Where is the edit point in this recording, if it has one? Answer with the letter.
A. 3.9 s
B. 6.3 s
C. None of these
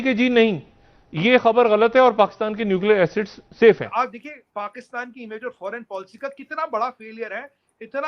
A